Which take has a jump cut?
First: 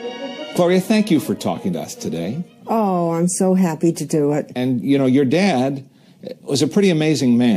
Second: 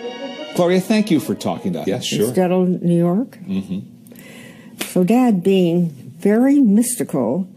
first; 1 cut; at 1.8 s

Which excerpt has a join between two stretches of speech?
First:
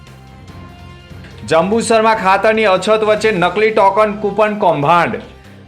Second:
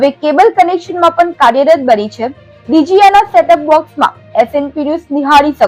first; 1 cut; at 1.2 s

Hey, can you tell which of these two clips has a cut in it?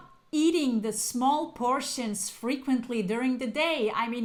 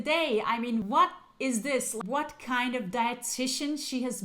second; 1 cut; at 1.9 s

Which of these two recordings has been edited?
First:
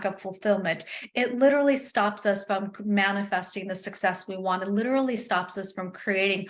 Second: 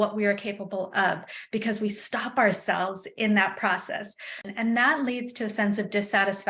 second; 1 cut; at 4.4 s

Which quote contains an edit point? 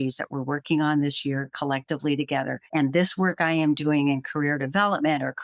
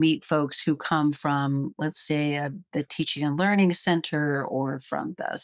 first; 1 cut; at 2.6 s

